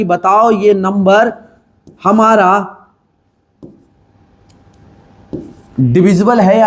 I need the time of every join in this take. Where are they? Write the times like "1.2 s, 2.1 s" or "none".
none